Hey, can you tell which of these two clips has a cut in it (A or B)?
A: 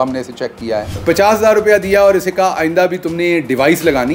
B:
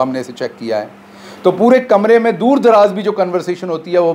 A